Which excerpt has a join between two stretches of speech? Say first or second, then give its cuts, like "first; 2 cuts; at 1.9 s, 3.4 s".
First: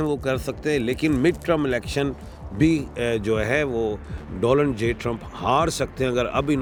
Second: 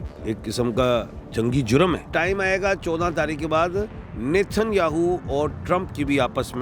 second; 1 cut; at 2.1 s